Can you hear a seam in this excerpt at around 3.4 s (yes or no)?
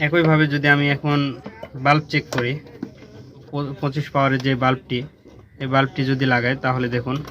yes